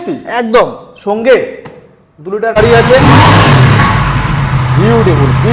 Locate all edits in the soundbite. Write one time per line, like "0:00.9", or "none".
0:02.6